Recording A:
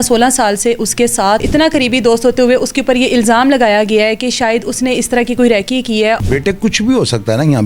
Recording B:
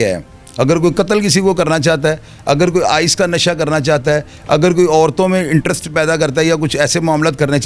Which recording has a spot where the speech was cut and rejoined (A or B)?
A